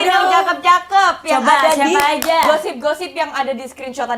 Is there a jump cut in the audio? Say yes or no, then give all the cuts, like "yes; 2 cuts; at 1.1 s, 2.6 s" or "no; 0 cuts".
no; 0 cuts